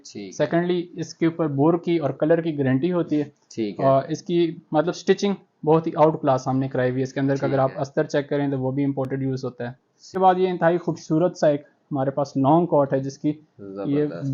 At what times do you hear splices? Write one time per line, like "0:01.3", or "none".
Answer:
0:10.1